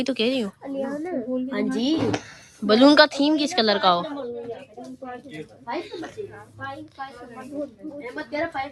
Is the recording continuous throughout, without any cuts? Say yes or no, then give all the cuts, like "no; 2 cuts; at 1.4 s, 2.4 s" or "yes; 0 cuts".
yes; 0 cuts